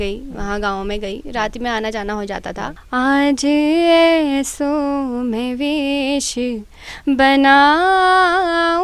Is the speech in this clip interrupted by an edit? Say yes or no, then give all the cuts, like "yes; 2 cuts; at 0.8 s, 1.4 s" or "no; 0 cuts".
yes; 1 cut; at 2.8 s